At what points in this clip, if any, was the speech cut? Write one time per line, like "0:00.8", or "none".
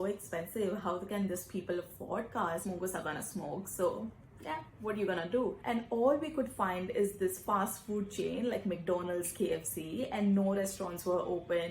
0:02.6
0:05.6